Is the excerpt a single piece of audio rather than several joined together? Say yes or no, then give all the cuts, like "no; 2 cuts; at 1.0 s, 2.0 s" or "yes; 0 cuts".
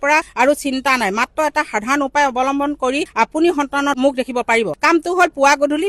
yes; 0 cuts